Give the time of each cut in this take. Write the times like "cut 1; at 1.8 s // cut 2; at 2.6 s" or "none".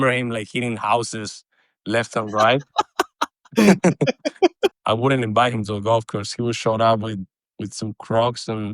cut 1; at 4.8 s